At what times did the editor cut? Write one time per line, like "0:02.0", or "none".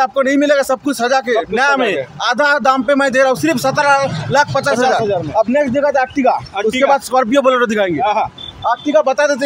none